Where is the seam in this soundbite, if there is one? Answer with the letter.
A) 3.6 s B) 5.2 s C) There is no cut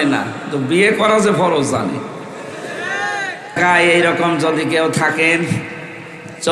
A